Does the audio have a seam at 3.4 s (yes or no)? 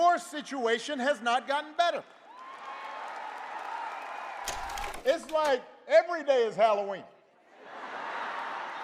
no